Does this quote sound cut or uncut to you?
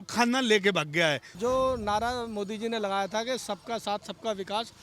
cut